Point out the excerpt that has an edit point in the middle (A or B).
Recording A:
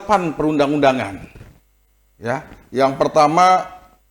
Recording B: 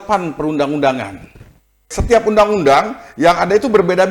B